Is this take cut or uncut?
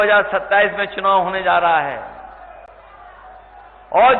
uncut